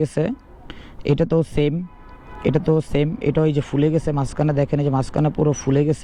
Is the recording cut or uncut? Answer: uncut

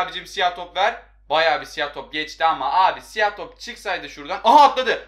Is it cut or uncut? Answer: uncut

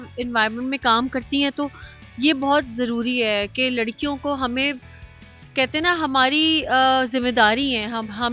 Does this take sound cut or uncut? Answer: uncut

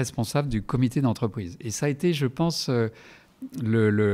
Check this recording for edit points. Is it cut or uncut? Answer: uncut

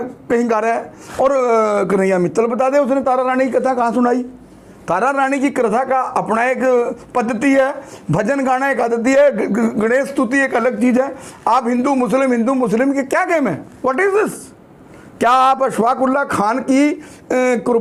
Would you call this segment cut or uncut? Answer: uncut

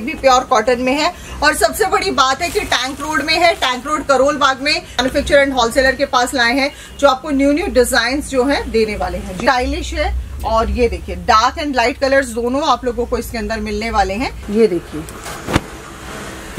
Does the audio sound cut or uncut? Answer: cut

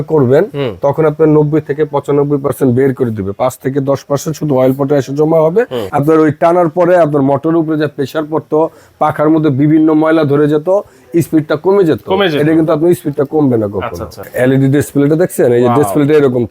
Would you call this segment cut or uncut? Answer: cut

